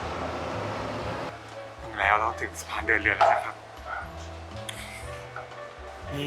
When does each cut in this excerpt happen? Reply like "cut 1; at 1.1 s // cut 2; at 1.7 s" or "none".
cut 1; at 1.3 s